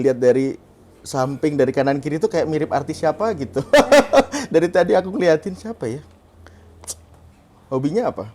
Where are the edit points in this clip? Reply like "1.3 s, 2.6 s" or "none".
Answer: none